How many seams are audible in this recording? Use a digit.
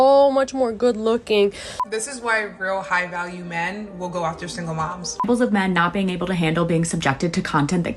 2